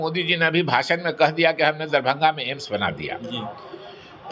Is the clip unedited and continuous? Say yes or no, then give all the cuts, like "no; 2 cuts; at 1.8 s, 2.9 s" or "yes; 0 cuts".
yes; 0 cuts